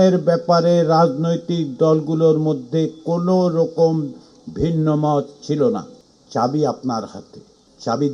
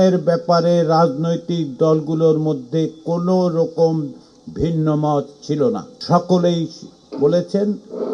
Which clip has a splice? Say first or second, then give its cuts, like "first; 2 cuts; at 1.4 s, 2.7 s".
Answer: first; 1 cut; at 6.0 s